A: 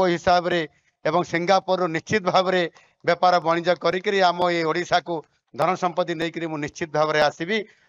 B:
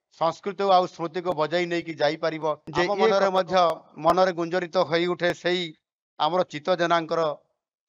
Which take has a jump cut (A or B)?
B